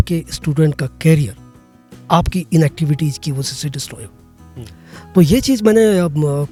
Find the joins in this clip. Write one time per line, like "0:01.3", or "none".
none